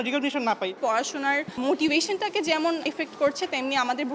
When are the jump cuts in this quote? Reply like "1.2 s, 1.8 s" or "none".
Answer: 0.8 s, 2.8 s